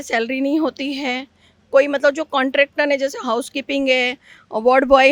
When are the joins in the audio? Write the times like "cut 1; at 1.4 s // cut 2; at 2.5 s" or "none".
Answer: none

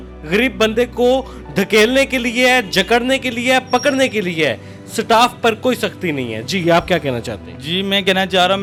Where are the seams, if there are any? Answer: none

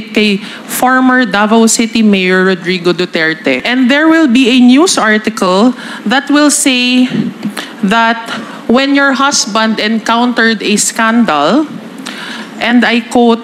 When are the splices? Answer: cut 1; at 3.6 s

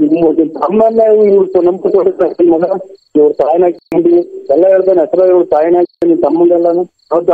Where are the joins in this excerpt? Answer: none

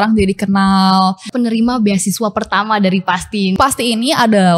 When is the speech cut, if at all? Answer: cut 1; at 1.2 s // cut 2; at 3.6 s

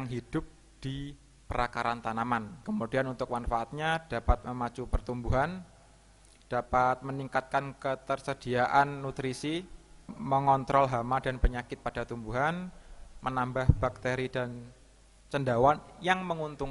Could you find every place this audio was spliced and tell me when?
cut 1; at 2.5 s

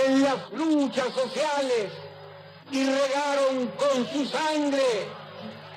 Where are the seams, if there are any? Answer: none

